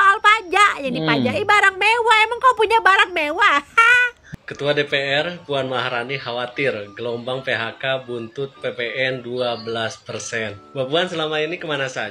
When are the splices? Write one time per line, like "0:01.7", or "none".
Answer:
0:04.2